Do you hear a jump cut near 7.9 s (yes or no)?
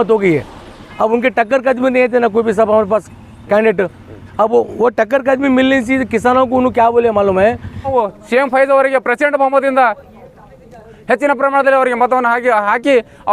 yes